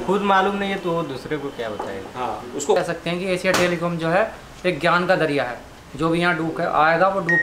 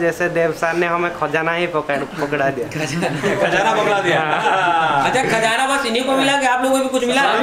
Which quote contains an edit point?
first; 1 cut; at 2.8 s

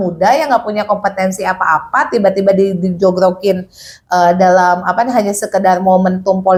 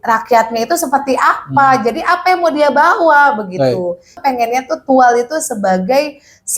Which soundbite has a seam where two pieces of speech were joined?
second; 1 cut; at 4.1 s

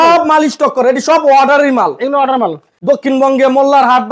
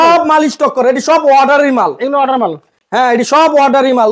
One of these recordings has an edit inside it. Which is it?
first; 1 cut; at 2.7 s

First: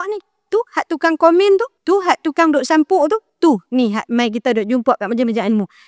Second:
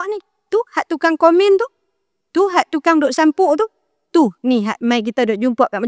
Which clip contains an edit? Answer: first; 2 cuts; at 1.7 s, 3.3 s

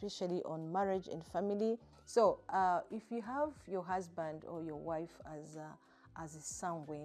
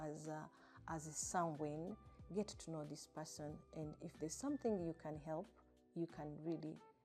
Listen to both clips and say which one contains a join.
first; 1 cut; at 1.9 s

